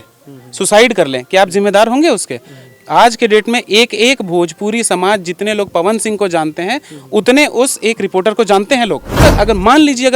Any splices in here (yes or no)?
yes